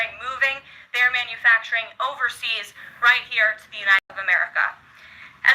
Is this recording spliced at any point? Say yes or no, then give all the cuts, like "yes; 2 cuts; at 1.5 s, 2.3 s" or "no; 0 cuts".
yes; 1 cut; at 4.1 s